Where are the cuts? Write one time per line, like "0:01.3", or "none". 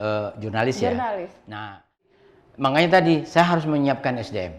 0:02.0